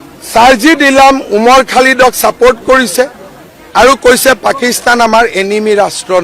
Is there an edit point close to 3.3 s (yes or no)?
no